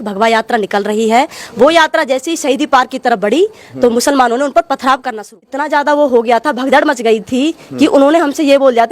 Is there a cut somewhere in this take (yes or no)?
yes